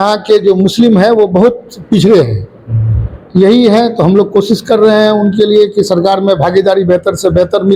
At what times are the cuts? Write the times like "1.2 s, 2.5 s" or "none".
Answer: none